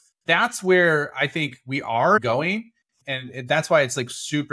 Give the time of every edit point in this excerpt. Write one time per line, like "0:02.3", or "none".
0:02.2